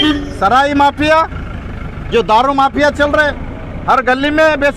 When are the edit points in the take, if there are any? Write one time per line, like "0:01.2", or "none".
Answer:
none